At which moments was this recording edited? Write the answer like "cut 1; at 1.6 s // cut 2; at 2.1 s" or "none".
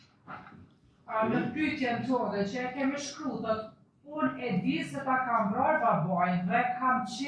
none